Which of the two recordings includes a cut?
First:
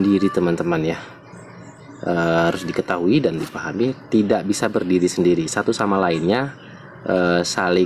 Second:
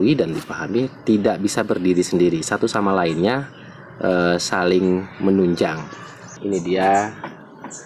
second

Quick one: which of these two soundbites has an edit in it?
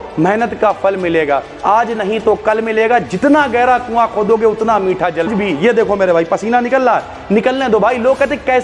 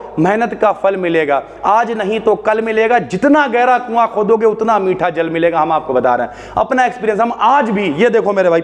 first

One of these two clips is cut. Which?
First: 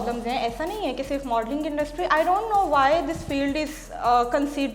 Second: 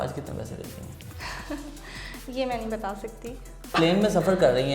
second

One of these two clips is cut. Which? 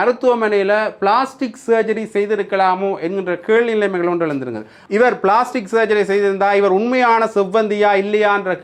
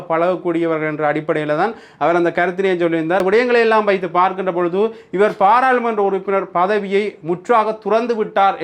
second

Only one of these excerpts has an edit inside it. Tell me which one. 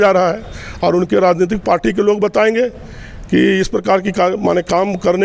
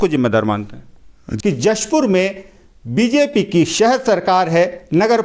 second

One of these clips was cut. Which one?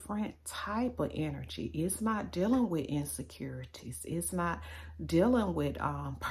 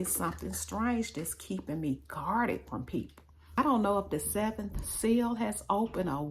second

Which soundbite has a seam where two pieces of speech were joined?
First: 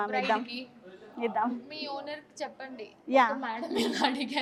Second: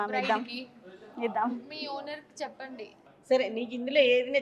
second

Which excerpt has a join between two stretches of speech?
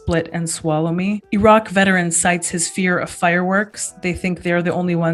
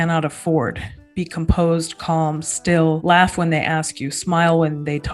second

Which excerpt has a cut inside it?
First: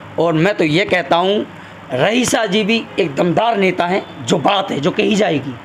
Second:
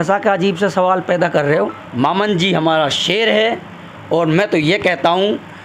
second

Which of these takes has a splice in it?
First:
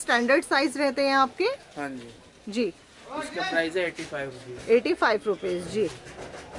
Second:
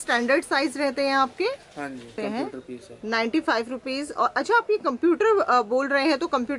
second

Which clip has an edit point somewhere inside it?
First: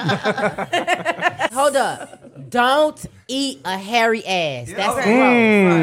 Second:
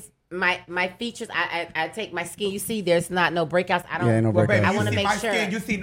first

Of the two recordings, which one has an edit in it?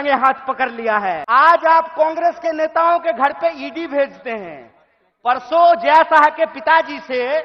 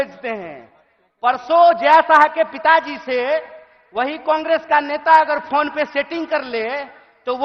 first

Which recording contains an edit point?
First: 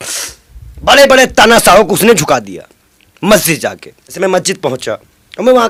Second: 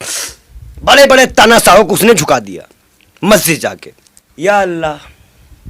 second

